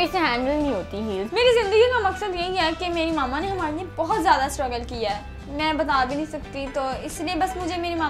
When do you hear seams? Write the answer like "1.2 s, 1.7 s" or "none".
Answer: 1.3 s